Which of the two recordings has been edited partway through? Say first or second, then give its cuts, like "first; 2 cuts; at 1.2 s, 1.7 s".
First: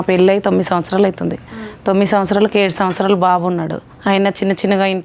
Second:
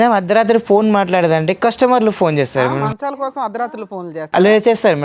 first; 1 cut; at 3.8 s